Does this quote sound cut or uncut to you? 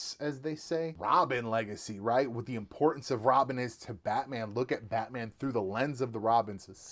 cut